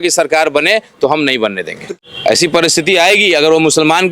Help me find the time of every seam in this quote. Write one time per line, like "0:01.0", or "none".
0:01.8